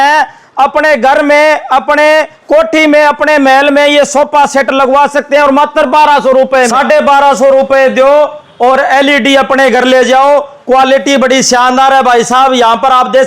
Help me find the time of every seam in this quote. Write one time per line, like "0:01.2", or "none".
0:06.7